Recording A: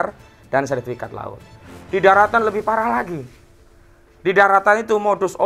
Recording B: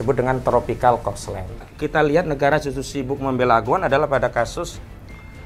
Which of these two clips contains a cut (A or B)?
B